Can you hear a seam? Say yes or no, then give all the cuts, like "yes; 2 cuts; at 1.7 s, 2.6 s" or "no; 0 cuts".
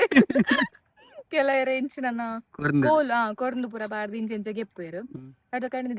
no; 0 cuts